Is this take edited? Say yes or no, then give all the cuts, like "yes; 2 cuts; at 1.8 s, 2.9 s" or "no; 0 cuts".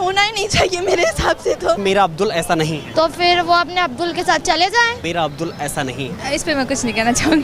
yes; 4 cuts; at 1.8 s, 2.9 s, 5.0 s, 6.2 s